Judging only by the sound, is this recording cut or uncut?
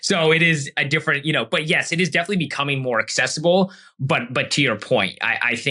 uncut